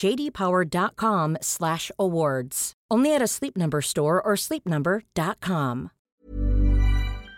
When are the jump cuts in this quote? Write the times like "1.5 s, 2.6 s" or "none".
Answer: 5.9 s